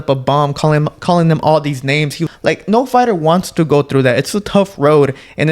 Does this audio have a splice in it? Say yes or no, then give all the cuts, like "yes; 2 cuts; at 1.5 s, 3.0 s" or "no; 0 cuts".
yes; 1 cut; at 2.3 s